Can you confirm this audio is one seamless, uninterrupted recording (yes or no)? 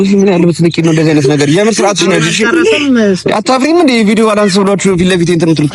yes